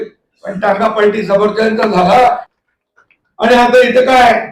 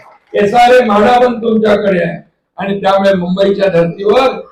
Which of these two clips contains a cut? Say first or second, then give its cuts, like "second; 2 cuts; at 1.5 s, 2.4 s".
first; 1 cut; at 2.5 s